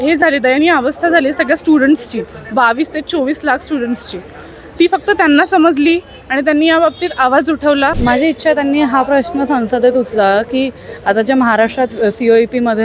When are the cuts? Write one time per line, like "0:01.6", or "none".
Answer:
0:08.0

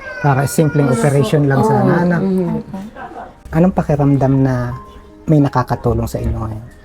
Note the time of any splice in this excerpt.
0:03.4

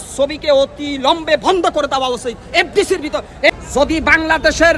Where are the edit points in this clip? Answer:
0:03.6

